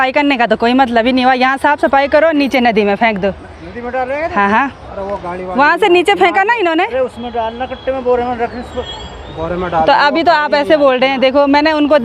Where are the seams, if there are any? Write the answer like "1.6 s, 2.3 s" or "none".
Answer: none